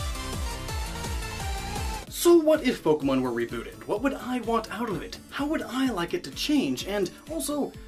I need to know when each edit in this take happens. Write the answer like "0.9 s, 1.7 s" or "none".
none